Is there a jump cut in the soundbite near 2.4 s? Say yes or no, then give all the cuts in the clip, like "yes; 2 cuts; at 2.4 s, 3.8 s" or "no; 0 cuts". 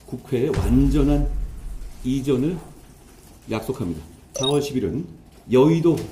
no; 1 cut; at 4.2 s